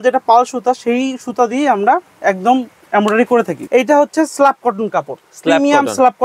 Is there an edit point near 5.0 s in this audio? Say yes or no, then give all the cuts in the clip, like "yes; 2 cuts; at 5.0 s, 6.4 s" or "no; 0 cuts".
no; 1 cut; at 3.6 s